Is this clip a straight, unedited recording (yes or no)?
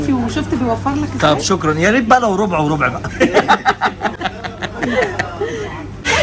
yes